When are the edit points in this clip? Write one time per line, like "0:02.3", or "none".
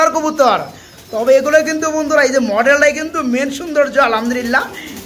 none